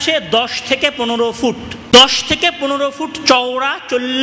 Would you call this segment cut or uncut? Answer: cut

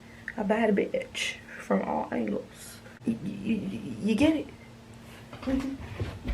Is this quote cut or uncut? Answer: cut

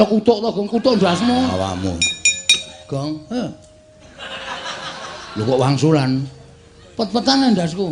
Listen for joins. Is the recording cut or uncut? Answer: cut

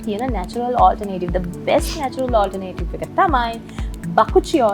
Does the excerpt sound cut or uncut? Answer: uncut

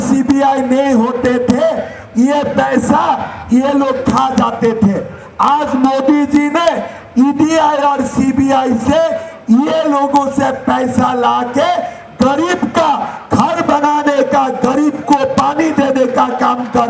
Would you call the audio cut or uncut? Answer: uncut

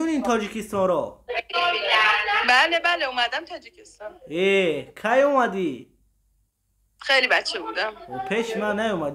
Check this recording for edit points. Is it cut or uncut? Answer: uncut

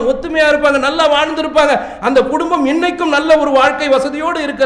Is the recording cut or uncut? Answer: uncut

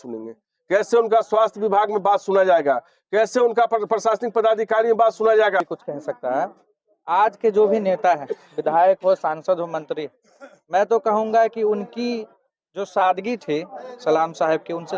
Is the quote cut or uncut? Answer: cut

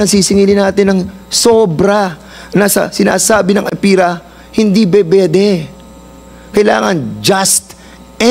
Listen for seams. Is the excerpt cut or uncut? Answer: uncut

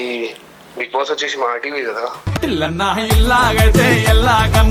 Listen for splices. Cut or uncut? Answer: uncut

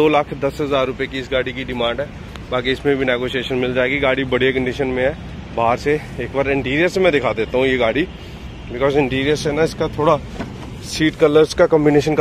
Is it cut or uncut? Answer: uncut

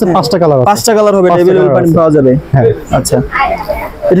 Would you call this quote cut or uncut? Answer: uncut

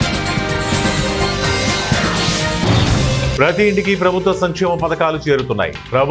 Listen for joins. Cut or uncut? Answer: uncut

